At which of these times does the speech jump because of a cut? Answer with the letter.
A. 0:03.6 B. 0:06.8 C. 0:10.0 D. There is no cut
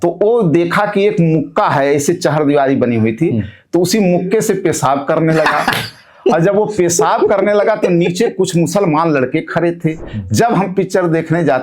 C